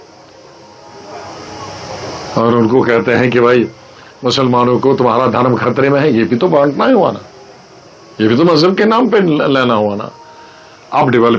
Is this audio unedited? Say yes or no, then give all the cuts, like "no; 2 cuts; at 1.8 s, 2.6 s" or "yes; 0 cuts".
yes; 0 cuts